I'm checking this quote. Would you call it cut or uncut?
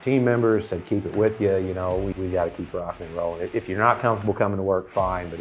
cut